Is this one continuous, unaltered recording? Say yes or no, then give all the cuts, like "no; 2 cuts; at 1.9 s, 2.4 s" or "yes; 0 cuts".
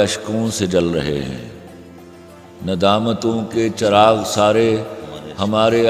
yes; 0 cuts